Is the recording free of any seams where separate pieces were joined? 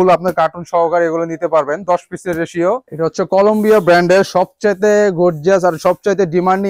no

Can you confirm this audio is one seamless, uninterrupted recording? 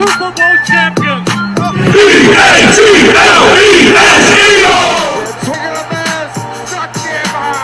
no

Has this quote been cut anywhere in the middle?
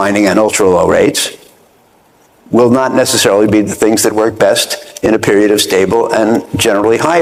no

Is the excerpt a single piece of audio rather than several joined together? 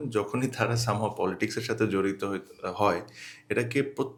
yes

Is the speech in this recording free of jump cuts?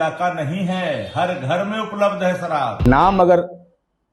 no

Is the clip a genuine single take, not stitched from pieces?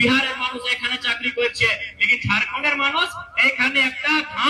yes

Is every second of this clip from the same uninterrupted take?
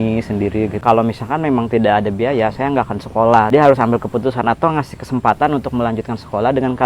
no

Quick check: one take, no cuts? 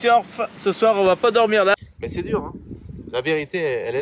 no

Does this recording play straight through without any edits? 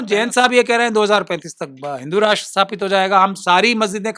yes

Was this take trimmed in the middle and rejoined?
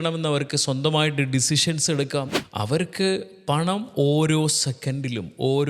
yes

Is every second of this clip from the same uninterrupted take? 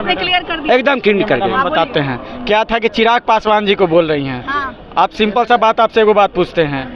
yes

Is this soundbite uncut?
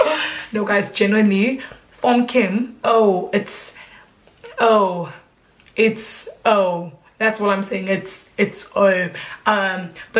yes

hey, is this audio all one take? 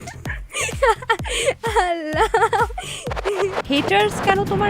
no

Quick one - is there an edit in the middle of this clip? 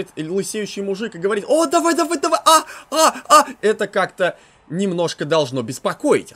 no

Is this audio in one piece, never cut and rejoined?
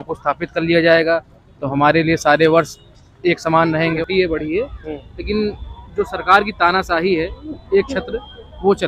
no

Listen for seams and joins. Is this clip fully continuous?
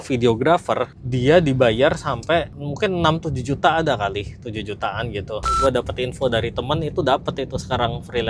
no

